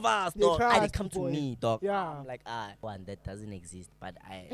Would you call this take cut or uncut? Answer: cut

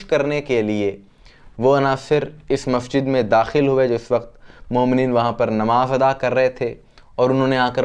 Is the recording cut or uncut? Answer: uncut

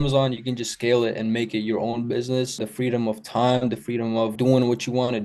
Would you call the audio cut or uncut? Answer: uncut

